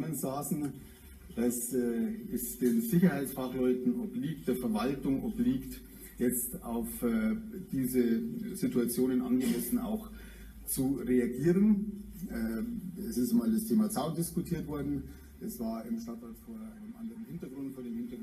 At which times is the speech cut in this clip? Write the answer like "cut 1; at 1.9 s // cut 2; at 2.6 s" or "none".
cut 1; at 9.9 s